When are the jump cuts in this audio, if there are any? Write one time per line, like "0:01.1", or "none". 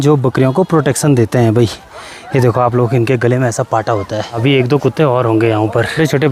none